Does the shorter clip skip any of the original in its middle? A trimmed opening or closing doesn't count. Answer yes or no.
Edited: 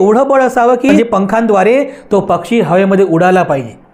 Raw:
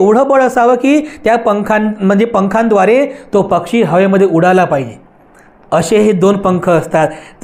yes